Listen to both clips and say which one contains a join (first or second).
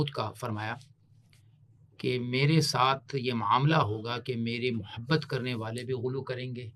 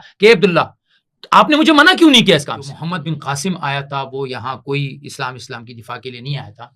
second